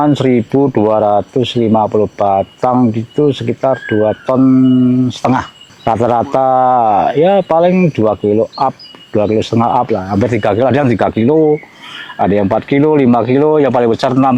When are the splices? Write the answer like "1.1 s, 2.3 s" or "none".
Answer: none